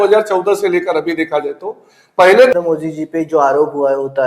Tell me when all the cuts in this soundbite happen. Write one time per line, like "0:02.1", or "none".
0:02.5